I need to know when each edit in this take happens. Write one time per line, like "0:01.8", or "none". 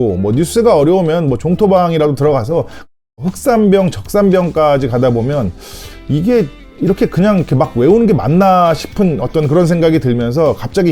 0:02.9